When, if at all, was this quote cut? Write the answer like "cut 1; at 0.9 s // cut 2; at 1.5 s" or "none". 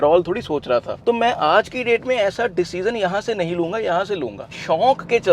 cut 1; at 4.4 s